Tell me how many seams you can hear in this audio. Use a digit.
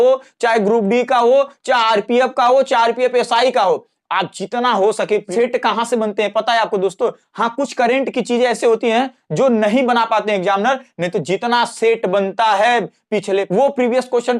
2